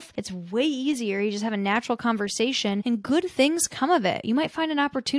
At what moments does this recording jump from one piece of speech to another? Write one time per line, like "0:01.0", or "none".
0:02.8